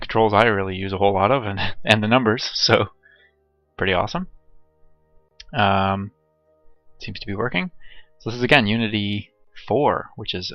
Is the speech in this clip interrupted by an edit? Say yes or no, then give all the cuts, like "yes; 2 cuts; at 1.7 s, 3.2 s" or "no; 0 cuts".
yes; 1 cut; at 4.4 s